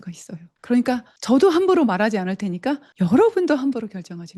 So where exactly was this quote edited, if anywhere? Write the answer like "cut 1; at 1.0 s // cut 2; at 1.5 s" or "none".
cut 1; at 1.1 s // cut 2; at 2.9 s